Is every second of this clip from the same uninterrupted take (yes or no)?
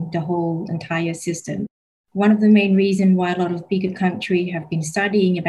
no